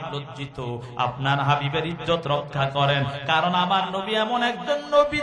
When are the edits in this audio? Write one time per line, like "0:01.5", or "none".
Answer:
none